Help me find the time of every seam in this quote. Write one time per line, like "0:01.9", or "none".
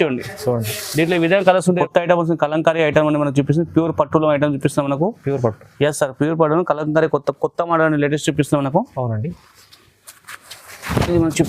0:01.8